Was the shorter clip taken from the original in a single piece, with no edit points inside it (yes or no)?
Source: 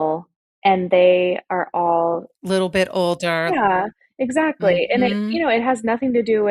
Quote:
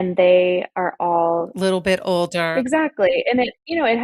no